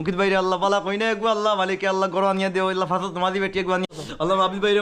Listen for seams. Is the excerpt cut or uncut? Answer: cut